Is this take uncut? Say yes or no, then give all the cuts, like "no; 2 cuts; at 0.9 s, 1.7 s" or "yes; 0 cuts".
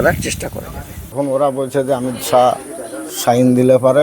no; 1 cut; at 1.2 s